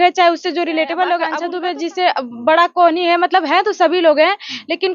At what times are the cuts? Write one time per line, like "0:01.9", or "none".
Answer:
0:01.4